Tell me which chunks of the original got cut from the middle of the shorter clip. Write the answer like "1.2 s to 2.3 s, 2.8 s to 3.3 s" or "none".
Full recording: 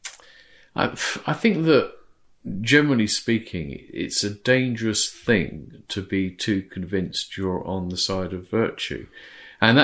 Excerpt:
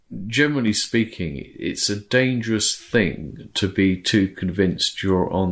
none